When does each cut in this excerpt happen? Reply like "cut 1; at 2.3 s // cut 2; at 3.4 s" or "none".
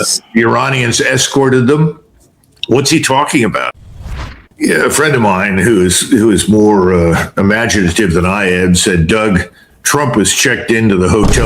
cut 1; at 4.1 s

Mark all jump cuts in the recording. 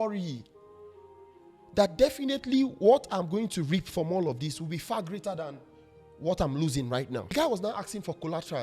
cut 1; at 7.3 s

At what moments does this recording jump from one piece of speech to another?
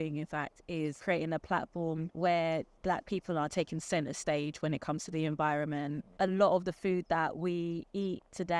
cut 1; at 1.0 s // cut 2; at 2.1 s // cut 3; at 2.7 s // cut 4; at 6.1 s

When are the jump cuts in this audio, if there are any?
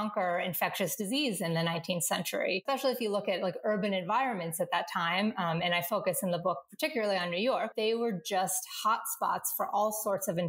cut 1; at 2.6 s // cut 2; at 7.7 s

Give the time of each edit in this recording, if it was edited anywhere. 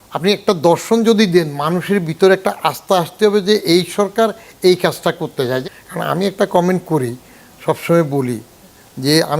cut 1; at 5.6 s

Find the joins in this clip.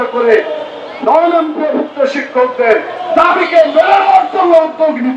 none

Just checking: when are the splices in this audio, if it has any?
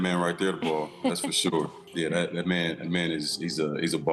cut 1; at 1.8 s

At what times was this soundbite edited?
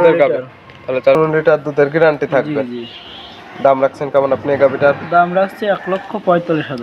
cut 1; at 1.1 s

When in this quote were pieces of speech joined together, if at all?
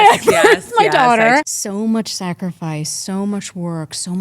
cut 1; at 1.5 s

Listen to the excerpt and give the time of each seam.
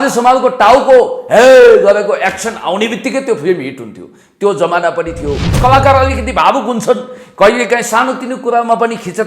cut 1; at 5.5 s

